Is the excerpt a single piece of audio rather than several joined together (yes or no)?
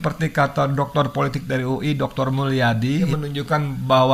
yes